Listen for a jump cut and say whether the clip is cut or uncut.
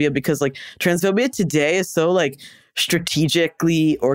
uncut